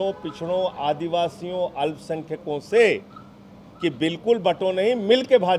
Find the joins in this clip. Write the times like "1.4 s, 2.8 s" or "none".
none